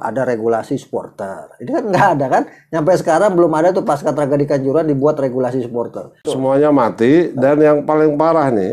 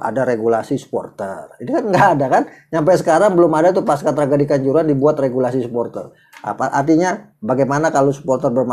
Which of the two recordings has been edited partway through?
first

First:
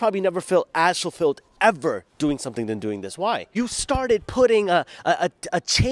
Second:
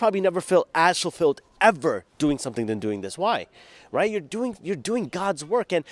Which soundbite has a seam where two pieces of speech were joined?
first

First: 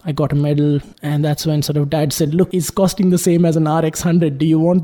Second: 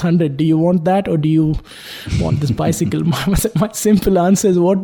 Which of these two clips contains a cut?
first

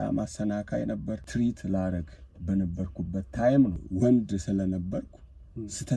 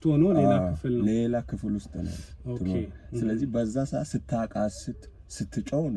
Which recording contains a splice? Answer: first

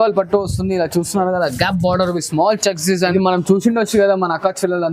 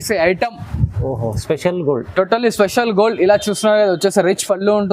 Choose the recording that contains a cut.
first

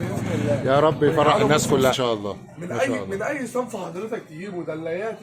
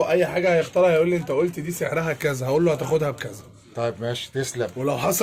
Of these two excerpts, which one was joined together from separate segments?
first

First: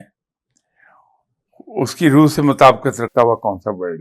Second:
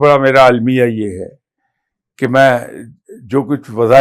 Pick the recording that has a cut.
first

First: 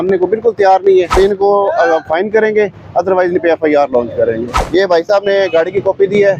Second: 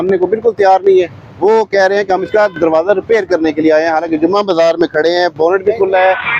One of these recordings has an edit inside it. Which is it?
first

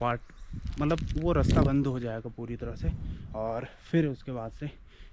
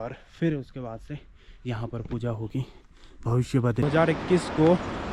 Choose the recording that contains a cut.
second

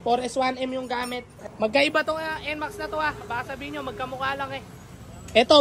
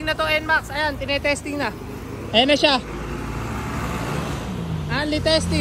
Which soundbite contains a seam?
first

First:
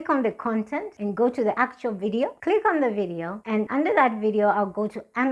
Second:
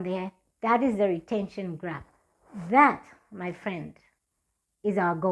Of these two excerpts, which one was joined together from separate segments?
first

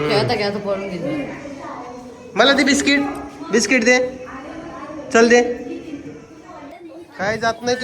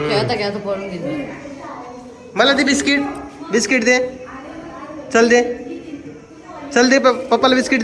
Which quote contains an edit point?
first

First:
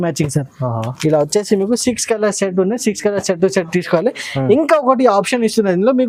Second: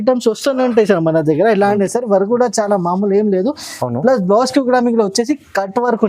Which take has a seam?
second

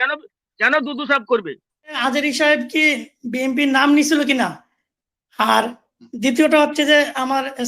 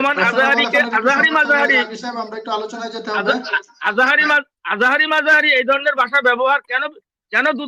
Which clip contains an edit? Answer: first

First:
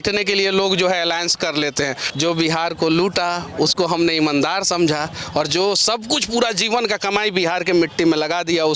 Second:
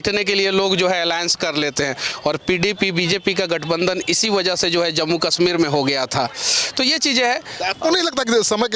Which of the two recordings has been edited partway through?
first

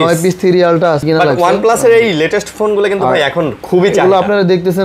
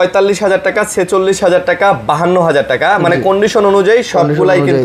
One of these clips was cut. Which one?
first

